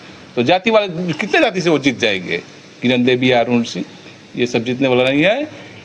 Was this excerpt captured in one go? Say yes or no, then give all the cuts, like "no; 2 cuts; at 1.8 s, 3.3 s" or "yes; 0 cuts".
yes; 0 cuts